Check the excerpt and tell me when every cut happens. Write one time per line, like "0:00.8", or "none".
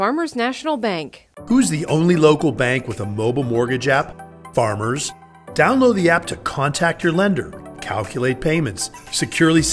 none